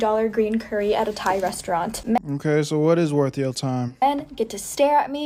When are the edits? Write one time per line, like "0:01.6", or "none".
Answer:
none